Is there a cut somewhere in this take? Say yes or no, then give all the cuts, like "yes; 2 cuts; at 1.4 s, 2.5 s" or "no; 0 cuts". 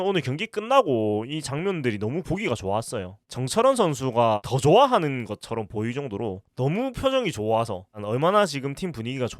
yes; 2 cuts; at 3.2 s, 6.4 s